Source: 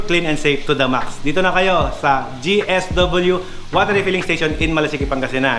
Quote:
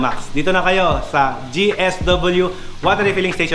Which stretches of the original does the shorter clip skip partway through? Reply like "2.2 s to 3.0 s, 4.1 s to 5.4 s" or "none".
none